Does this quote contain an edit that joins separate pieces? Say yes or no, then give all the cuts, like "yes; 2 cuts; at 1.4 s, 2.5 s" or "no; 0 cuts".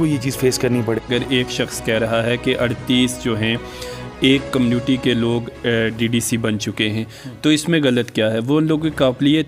no; 0 cuts